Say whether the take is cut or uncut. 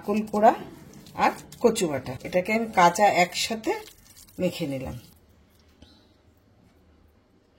cut